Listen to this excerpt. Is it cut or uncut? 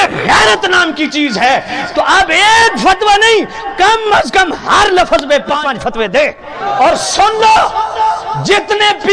uncut